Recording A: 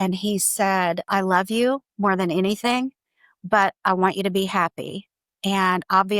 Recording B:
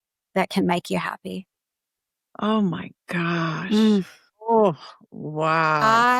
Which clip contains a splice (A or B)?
A